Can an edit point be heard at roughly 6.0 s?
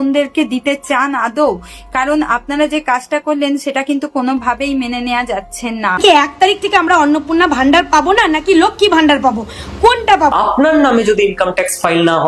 yes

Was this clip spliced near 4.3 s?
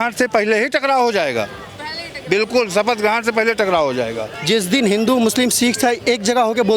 yes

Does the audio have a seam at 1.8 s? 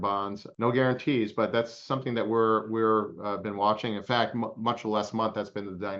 no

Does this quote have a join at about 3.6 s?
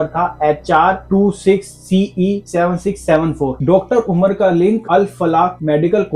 yes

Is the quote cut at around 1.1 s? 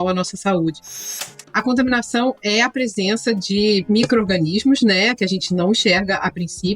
yes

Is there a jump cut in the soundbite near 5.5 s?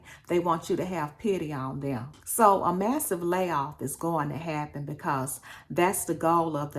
no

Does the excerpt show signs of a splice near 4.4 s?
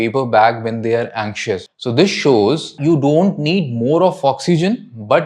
no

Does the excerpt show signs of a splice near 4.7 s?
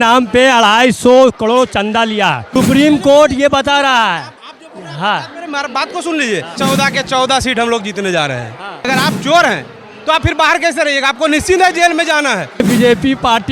no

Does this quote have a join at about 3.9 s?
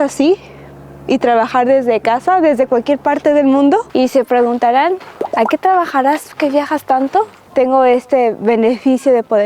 yes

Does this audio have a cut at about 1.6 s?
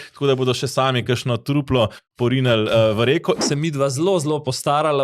no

